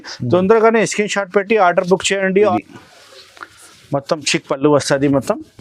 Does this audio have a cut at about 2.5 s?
yes; 1 cut; at 2.5 s

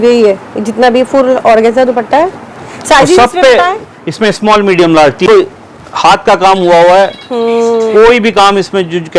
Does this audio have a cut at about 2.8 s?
no; 1 cut; at 5.3 s

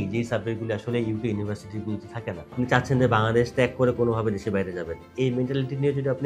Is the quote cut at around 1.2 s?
no; 2 cuts; at 2.5 s, 5.1 s

